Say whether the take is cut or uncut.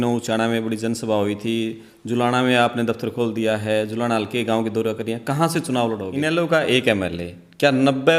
cut